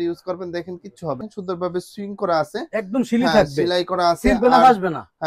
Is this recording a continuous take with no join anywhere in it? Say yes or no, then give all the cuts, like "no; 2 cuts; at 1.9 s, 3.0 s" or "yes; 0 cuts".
no; 1 cut; at 1.2 s